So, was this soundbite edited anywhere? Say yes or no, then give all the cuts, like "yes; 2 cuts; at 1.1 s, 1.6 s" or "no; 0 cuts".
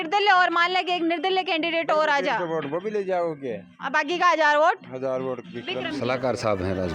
yes; 1 cut; at 6.0 s